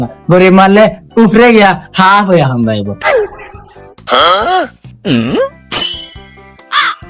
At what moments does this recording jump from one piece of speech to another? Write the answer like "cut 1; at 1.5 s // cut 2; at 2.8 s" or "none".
cut 1; at 3.0 s